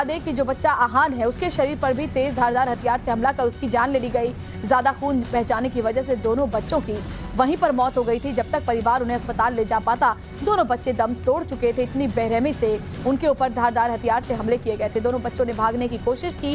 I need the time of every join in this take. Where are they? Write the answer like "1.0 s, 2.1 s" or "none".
5.7 s